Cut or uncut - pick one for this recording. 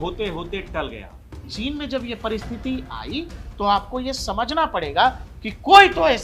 cut